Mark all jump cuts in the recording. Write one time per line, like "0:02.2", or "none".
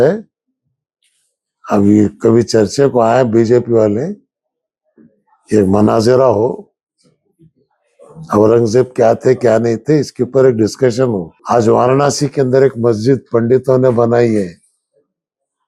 0:11.3